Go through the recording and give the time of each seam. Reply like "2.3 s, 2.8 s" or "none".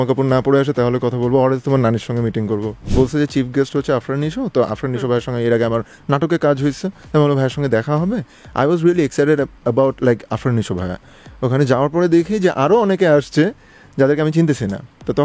2.9 s